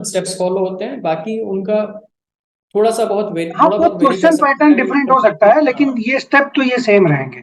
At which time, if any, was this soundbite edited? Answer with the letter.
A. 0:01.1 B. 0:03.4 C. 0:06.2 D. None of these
D